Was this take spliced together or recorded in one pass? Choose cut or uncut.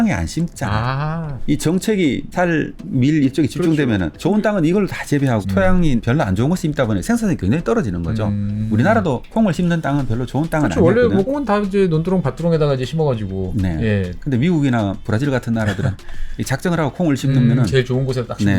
cut